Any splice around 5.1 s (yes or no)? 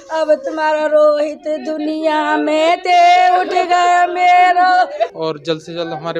yes